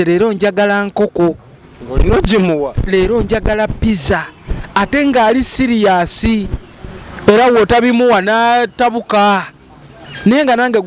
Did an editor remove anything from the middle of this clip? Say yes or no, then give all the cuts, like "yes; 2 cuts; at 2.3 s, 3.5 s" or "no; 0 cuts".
no; 0 cuts